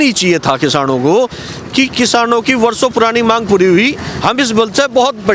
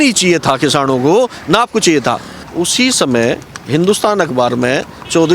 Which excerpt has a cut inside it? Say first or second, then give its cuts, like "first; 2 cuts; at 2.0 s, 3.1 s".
first; 1 cut; at 1.4 s